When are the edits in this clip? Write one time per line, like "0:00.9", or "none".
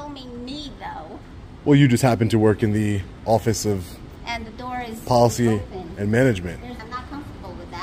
0:06.8